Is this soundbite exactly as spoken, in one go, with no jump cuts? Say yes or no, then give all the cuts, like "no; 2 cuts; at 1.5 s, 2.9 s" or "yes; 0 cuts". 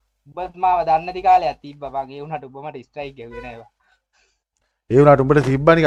yes; 0 cuts